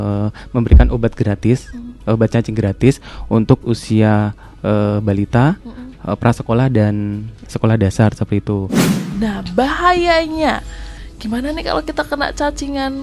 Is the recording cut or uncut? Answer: cut